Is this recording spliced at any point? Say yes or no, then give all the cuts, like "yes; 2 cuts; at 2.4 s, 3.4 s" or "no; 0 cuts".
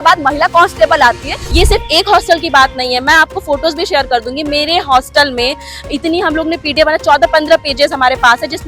yes; 1 cut; at 1.4 s